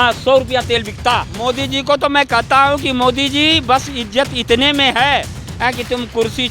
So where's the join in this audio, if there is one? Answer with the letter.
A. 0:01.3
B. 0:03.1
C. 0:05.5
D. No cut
A